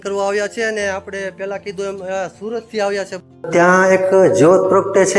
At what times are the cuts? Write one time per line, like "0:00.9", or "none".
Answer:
0:03.4